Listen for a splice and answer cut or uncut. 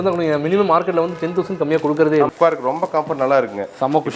cut